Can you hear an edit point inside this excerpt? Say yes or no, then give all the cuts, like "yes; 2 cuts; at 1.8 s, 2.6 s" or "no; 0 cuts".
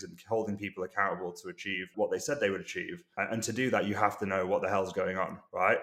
yes; 1 cut; at 1.9 s